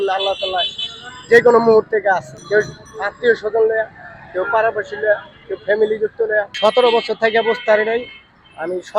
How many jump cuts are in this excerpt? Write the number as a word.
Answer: two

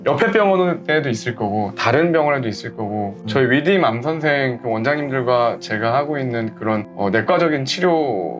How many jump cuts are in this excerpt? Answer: one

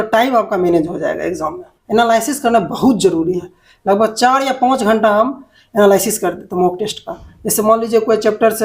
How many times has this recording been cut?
one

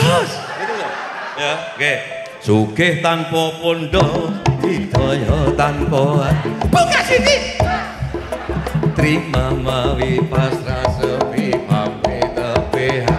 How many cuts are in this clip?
zero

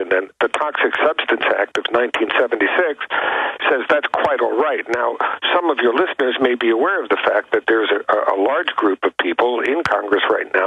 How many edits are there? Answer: one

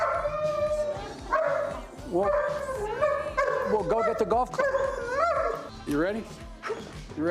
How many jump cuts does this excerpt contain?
one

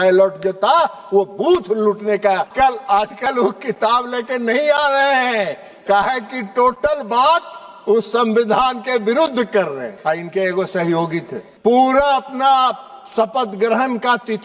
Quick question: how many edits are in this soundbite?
three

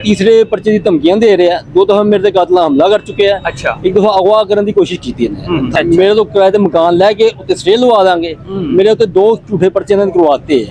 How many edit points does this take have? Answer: one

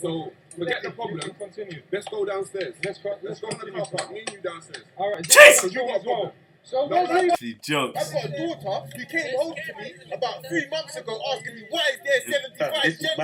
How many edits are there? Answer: one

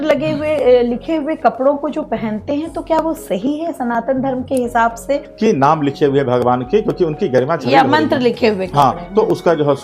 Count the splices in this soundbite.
one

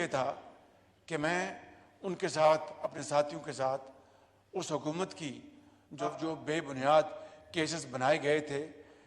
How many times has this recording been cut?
one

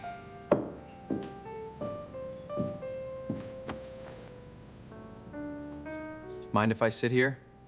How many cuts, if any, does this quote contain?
zero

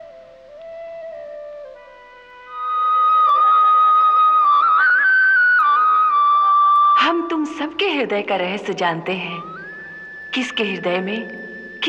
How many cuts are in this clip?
one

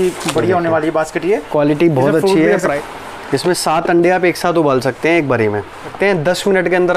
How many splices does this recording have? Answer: two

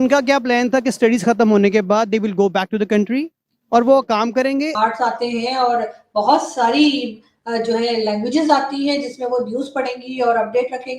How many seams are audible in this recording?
one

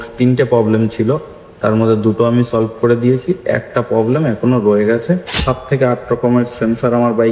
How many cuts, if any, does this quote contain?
one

